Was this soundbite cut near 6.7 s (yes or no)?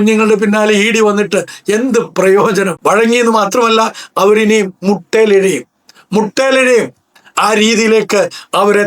no